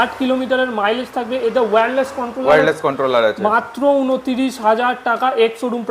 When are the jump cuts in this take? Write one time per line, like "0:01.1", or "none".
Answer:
none